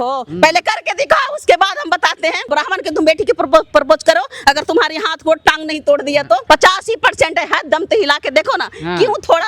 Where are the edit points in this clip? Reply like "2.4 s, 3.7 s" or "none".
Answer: 2.5 s, 6.4 s